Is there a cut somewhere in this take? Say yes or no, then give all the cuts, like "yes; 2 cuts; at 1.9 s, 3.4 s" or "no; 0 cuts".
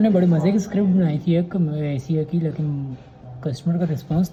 no; 0 cuts